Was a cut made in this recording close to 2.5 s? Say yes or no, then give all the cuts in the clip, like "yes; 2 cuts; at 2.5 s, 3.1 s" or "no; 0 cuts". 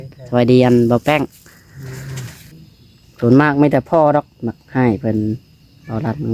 yes; 1 cut; at 2.5 s